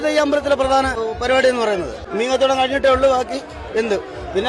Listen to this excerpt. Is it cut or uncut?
cut